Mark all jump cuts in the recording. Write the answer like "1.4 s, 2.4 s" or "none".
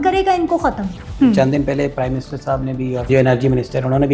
1.1 s, 3.1 s